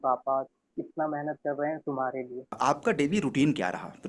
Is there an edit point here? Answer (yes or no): yes